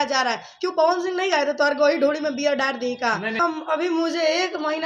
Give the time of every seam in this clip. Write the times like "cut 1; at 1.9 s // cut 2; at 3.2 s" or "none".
cut 1; at 3.4 s